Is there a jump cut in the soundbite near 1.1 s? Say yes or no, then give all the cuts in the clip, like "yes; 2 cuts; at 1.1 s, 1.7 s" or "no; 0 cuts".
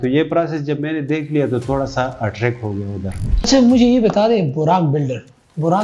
no; 1 cut; at 3.5 s